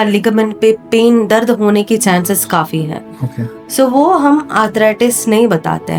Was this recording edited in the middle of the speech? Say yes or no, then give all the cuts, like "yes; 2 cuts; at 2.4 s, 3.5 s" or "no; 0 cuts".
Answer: no; 0 cuts